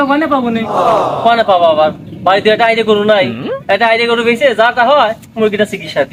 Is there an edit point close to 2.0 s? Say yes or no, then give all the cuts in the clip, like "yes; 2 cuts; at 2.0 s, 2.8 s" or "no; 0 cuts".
no; 0 cuts